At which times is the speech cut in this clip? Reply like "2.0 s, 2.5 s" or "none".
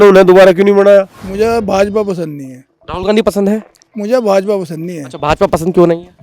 1.1 s